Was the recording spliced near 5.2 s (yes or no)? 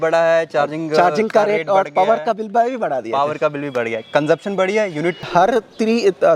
yes